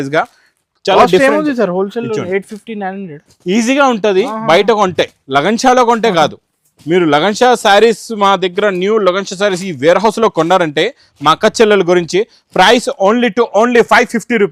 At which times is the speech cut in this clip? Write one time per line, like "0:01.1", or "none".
none